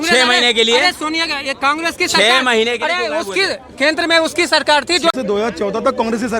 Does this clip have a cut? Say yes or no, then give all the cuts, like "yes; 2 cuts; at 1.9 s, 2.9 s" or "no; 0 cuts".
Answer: yes; 1 cut; at 5.1 s